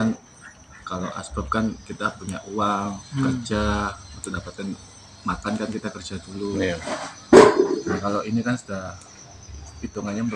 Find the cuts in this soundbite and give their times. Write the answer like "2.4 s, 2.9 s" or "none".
none